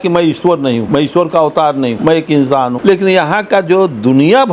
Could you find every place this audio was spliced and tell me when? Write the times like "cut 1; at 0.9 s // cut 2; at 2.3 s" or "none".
cut 1; at 0.8 s // cut 2; at 2.0 s // cut 3; at 2.8 s